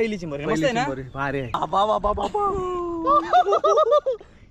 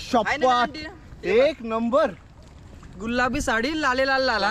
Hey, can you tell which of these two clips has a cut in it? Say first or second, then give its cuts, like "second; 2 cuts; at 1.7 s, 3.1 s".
first; 1 cut; at 1.6 s